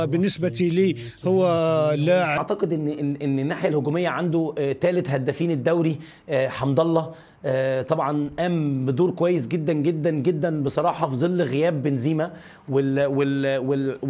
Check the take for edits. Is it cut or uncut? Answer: cut